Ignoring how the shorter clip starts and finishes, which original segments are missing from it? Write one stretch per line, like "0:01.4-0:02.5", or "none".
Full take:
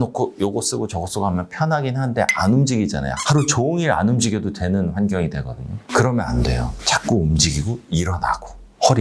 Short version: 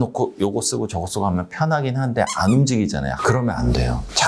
0:03.1-0:05.8